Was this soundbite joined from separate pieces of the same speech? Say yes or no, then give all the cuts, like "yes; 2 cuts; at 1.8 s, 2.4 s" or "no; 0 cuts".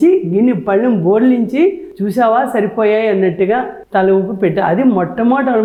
no; 0 cuts